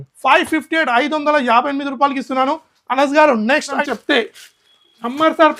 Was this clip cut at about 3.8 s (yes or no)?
yes